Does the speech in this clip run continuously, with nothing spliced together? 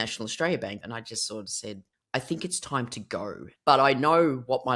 no; 3 cuts; at 0.8 s, 1.9 s, 3.4 s

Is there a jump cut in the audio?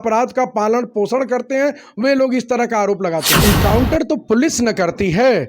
yes; 1 cut; at 3.3 s

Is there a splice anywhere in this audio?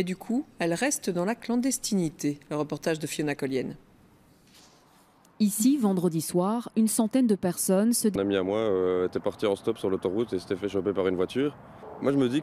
no; 0 cuts

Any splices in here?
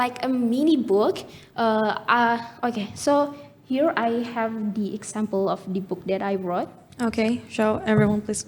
no; 0 cuts

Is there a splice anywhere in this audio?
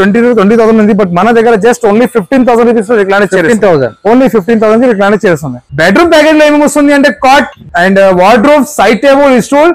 yes; 1 cut; at 5.6 s

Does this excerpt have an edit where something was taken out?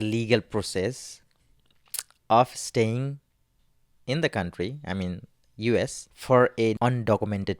yes; 2 cuts; at 6.1 s, 6.8 s

